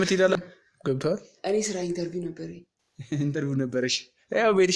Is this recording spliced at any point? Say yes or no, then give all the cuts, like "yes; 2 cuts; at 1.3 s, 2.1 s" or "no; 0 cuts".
no; 0 cuts